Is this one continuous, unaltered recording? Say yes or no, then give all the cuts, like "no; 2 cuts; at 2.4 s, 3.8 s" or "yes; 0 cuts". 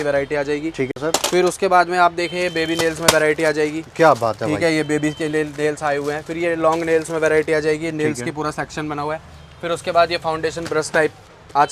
yes; 0 cuts